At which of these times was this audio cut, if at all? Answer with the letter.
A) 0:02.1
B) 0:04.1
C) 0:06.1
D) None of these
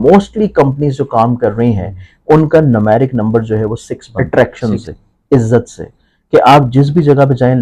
B